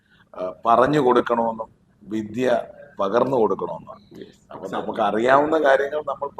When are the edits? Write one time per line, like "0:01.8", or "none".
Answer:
none